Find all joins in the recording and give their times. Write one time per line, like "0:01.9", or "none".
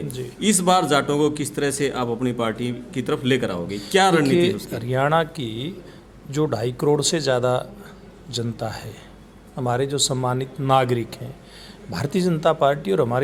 none